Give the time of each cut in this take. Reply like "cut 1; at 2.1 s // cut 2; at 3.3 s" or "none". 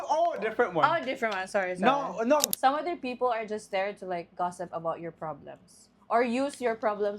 cut 1; at 2.5 s